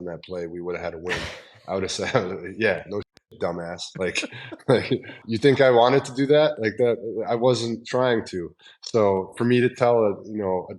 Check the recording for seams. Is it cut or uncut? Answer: cut